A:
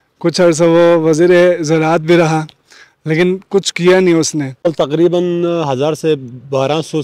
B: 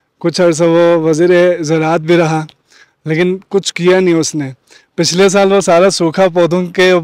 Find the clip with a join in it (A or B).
A